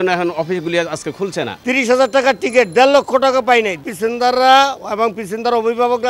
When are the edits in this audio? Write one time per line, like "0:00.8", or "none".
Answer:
0:01.6
0:03.8

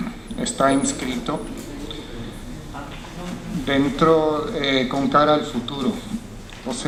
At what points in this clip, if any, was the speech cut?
none

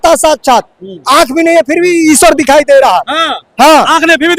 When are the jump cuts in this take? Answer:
none

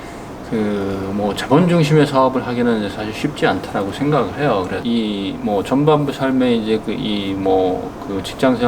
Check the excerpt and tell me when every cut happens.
0:04.8

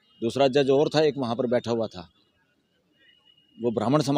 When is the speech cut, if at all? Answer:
none

